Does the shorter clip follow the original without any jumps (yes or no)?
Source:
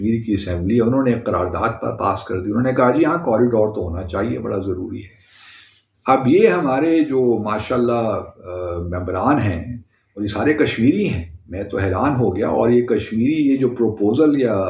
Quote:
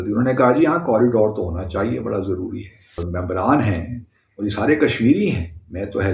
no